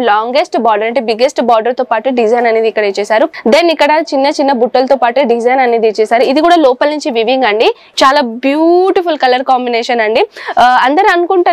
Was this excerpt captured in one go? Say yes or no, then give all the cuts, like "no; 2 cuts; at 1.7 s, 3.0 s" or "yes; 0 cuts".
no; 2 cuts; at 3.3 s, 7.8 s